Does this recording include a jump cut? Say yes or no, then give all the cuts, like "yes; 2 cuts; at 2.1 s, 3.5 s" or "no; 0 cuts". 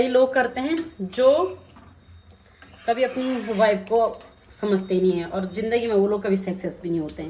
no; 0 cuts